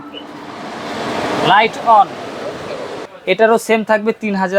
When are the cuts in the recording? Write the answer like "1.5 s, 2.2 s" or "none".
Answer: 3.1 s

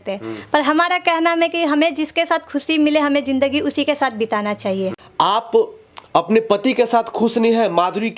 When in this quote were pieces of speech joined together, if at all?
5.0 s

